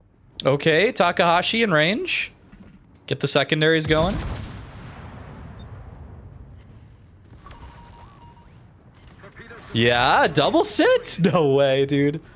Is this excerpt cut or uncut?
uncut